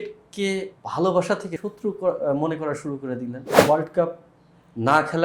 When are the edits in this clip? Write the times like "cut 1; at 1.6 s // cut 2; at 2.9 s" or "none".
cut 1; at 1.6 s // cut 2; at 3.5 s